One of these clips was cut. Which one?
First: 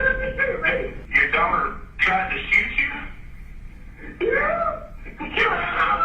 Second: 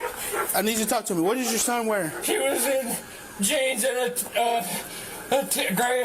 first; 1 cut; at 1.1 s

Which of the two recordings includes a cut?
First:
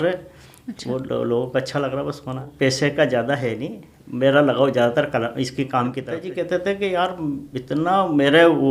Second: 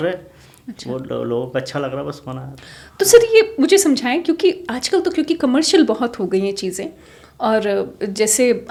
first; 2 cuts; at 2.5 s, 6.1 s

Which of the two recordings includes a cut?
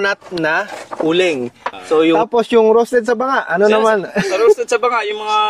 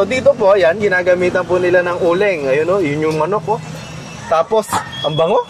first; 1 cut; at 2.2 s

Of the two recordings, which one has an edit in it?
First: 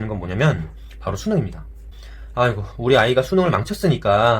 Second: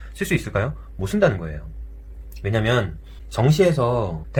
first; 1 cut; at 1.8 s

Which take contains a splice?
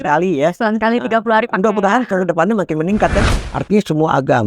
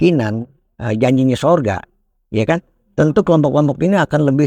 first; 1 cut; at 3.2 s

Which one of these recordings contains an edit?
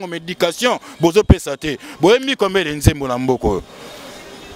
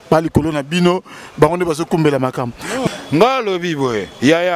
second; 1 cut; at 2.9 s

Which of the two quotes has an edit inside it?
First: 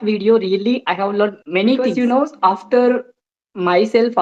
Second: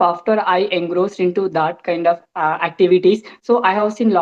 first; 1 cut; at 1.9 s

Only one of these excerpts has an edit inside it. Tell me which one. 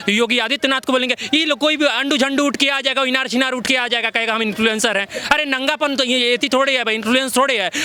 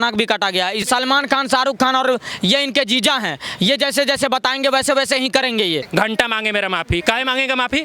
second; 2 cuts; at 0.8 s, 5.9 s

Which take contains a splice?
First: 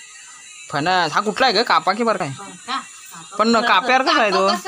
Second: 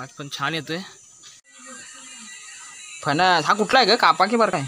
second; 1 cut; at 1.4 s

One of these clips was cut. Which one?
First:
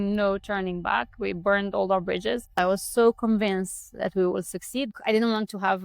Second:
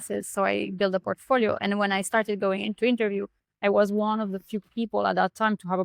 first; 2 cuts; at 2.6 s, 4.9 s

